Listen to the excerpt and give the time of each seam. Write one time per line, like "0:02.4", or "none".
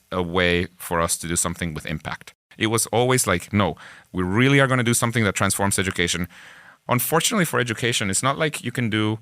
0:02.4
0:06.7